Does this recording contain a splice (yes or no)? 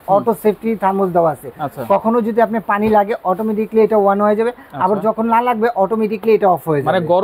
no